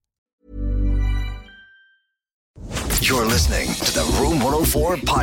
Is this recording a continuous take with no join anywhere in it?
no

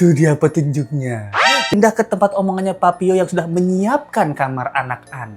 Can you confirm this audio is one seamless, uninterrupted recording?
no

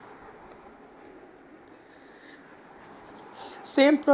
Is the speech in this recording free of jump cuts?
yes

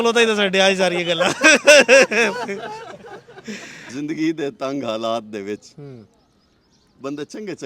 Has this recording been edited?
yes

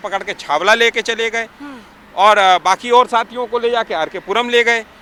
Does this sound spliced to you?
no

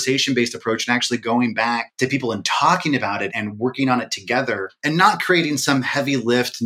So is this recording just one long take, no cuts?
no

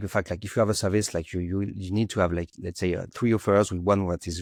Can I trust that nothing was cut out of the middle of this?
yes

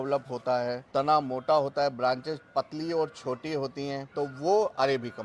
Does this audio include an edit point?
yes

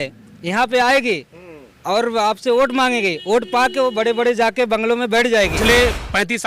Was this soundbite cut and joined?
yes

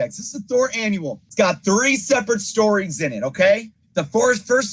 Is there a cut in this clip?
yes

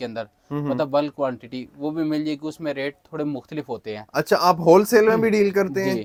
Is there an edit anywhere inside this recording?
no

